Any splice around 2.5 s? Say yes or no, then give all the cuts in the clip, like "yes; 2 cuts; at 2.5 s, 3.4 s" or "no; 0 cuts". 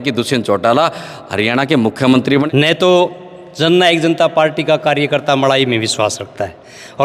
yes; 1 cut; at 2.5 s